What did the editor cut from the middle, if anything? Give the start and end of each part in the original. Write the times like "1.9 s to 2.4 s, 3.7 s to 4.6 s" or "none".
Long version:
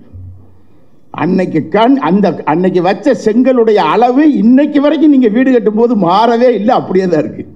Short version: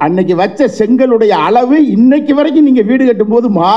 none